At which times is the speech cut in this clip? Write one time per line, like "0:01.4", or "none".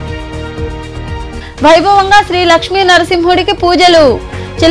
0:01.2